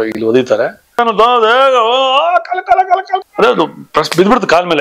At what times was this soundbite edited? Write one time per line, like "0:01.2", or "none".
0:01.0
0:03.3